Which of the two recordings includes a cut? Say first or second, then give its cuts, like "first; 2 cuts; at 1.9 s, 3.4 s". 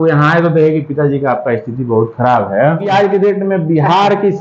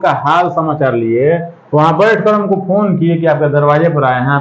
first; 1 cut; at 2.9 s